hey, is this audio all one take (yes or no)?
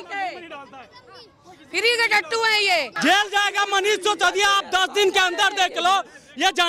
no